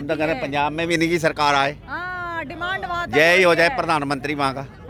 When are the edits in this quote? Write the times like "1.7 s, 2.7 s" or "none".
none